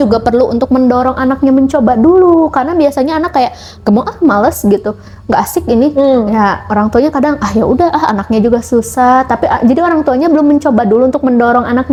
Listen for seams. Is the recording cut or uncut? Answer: uncut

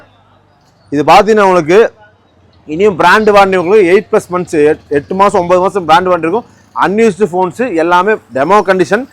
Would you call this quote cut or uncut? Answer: uncut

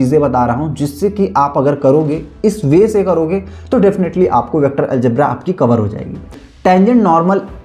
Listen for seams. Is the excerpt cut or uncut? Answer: cut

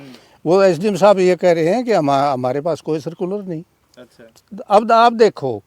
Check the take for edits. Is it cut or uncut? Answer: uncut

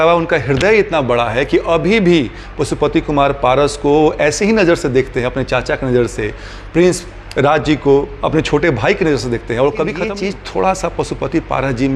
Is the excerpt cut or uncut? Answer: cut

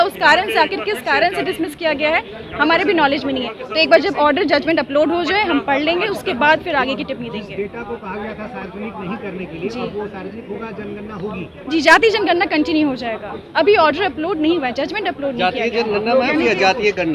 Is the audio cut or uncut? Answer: uncut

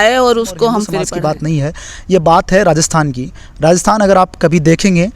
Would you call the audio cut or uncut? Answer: cut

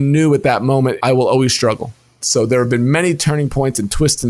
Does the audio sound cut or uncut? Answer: cut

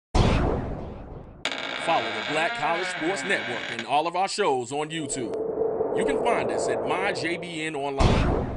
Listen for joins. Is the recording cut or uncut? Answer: cut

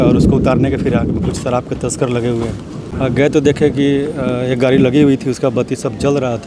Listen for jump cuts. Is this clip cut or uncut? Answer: cut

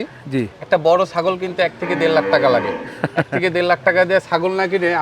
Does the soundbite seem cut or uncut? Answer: uncut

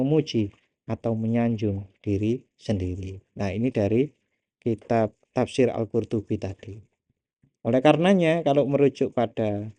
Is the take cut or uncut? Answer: uncut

